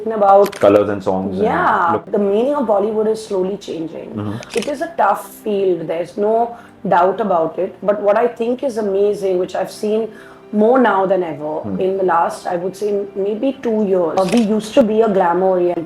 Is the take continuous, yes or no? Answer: no